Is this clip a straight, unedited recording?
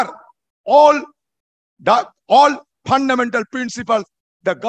yes; 0 cuts

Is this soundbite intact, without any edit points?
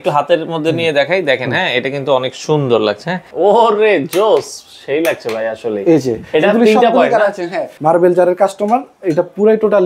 no; 2 cuts; at 3.3 s, 7.7 s

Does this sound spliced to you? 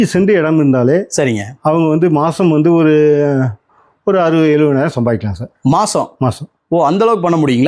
no; 0 cuts

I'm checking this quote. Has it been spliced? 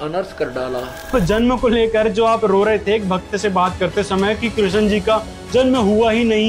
yes; 1 cut; at 1.1 s

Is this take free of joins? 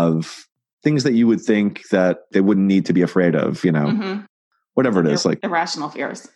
yes; 0 cuts

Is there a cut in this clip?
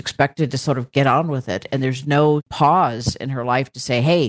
yes; 1 cut; at 2.4 s

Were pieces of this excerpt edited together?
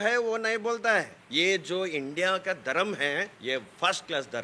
yes; 2 cuts; at 1.2 s, 3.3 s

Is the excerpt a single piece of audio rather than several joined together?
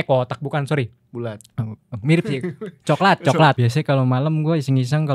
no; 1 cut; at 3.6 s

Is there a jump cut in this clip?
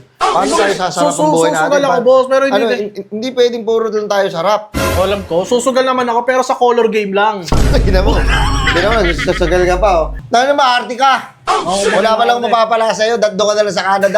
yes; 1 cut; at 10.2 s

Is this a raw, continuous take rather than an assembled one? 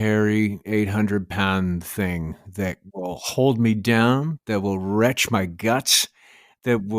no; 1 cut; at 2.9 s

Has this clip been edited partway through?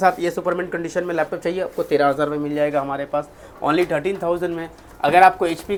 no; 0 cuts

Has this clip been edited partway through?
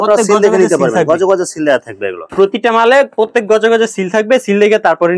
yes; 1 cut; at 2.2 s

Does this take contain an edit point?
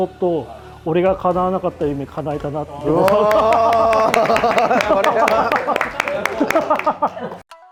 no; 0 cuts

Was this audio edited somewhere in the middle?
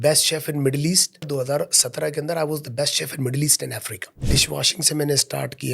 yes; 2 cuts; at 1.3 s, 4.3 s

